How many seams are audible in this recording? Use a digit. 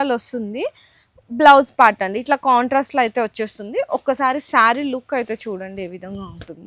0